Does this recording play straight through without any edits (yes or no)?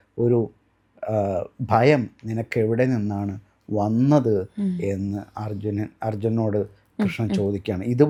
yes